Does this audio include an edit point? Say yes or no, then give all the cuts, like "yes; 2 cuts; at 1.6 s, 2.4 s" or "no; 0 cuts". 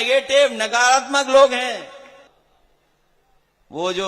yes; 1 cut; at 2.3 s